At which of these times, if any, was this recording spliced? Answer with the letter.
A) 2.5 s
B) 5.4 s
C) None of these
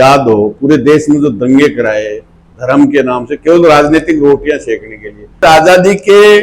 B